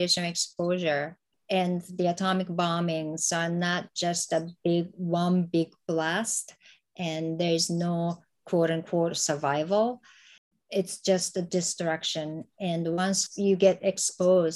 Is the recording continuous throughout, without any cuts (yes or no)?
yes